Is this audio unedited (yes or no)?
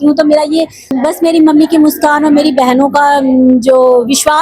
no